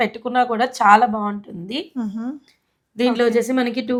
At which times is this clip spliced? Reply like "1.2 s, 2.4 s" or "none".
none

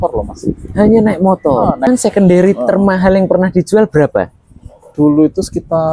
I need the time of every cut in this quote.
1.9 s

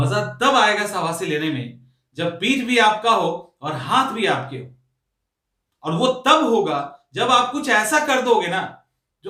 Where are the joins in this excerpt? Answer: none

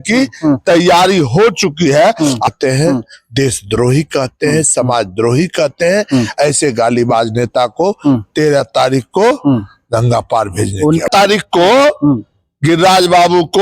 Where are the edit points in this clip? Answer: 2.5 s, 11.1 s

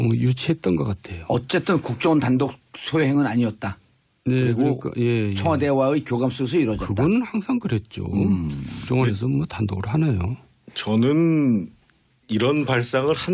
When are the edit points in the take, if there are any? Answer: 9.4 s

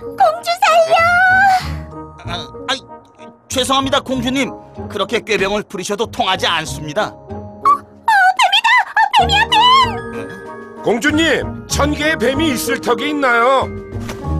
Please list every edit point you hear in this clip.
none

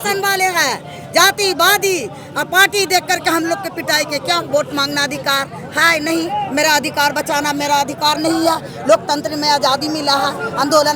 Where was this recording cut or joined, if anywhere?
none

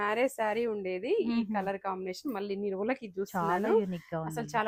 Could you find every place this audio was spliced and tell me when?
none

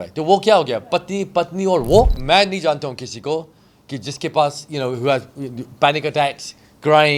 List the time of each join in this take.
2.2 s

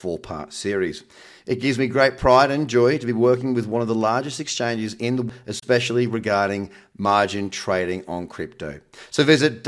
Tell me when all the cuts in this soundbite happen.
5.3 s

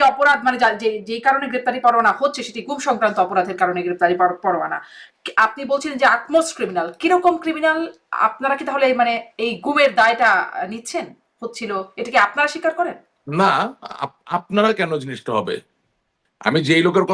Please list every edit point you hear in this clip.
none

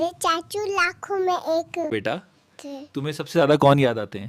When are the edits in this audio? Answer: 1.9 s

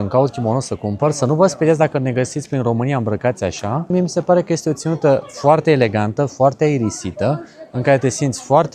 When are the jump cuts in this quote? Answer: none

